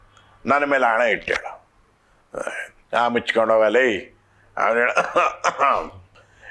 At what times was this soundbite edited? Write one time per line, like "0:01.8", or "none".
none